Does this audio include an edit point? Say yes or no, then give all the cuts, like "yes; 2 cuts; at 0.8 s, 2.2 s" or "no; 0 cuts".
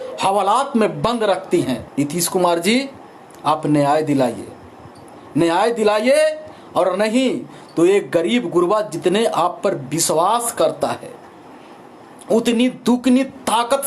yes; 1 cut; at 1.9 s